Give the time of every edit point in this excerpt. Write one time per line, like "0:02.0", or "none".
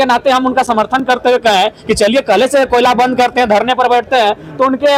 none